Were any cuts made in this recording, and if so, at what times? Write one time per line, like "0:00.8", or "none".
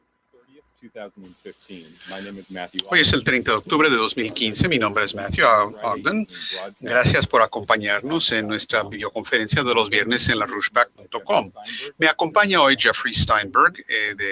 0:13.3